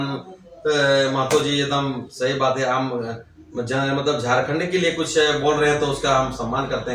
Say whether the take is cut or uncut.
uncut